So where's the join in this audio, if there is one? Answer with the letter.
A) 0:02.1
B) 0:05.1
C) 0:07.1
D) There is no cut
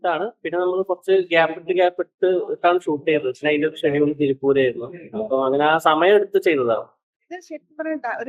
C